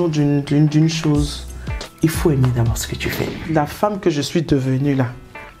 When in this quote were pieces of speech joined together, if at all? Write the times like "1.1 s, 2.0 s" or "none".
3.4 s